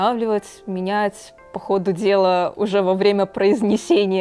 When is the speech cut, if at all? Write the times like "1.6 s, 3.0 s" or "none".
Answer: none